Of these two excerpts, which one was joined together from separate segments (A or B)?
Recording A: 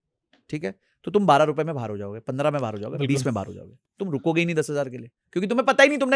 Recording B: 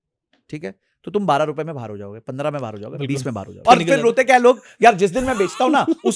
B